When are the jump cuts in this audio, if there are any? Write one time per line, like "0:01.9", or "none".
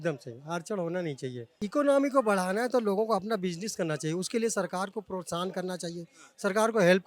0:01.5